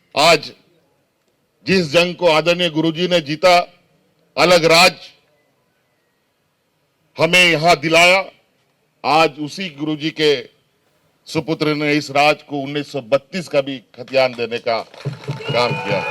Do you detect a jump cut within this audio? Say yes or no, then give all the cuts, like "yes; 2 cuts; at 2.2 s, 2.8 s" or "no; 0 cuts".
no; 0 cuts